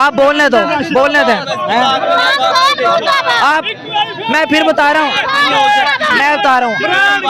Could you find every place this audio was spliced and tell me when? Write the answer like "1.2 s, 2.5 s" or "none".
none